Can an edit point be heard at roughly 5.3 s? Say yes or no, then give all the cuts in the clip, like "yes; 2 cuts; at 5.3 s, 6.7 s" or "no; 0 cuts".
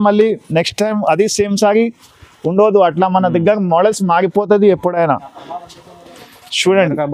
no; 0 cuts